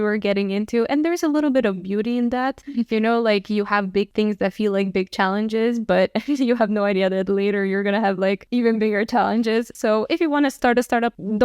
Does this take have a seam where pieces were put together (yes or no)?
yes